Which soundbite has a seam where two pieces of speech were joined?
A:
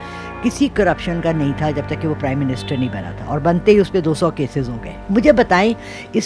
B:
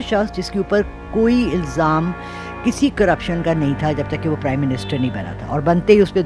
A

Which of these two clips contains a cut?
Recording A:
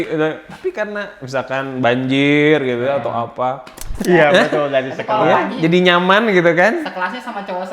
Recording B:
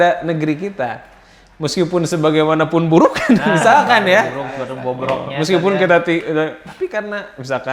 A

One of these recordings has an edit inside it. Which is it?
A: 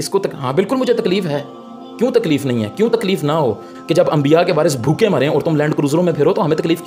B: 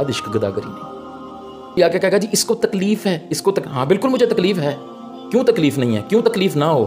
B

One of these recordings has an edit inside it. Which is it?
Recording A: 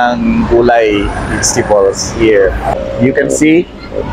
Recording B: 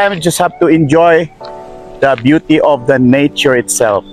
A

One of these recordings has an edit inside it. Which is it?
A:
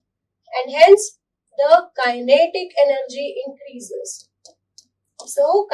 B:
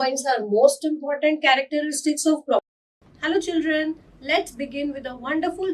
B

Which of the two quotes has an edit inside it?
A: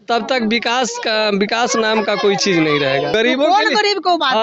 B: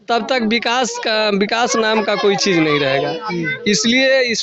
A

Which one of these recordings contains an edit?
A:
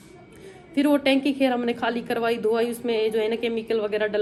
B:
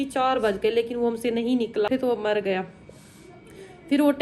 B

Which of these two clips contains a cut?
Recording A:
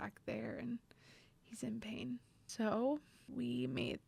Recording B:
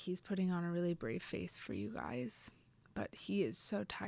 A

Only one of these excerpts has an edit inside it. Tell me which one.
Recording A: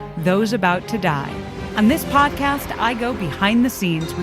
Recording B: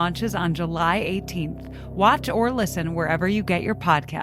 A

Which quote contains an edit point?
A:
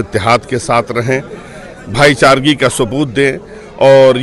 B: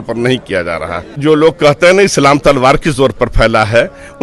B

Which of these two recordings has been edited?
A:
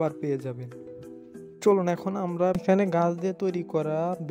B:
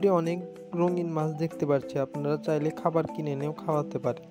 A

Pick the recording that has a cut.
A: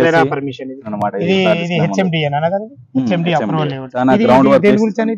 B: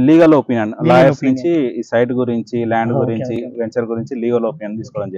A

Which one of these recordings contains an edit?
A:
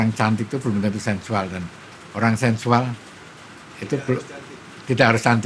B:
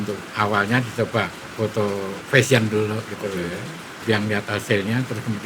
B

